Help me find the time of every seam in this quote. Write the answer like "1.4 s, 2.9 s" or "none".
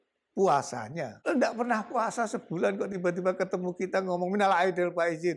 1.1 s